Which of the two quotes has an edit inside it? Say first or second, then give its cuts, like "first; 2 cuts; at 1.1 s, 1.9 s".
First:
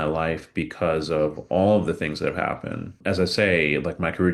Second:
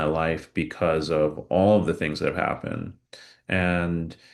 first; 1 cut; at 3.0 s